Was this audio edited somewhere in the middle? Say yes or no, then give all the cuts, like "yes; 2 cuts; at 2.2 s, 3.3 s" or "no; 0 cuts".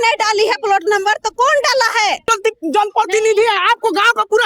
yes; 1 cut; at 2.3 s